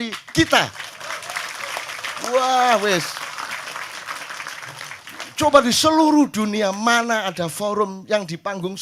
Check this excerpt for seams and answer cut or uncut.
uncut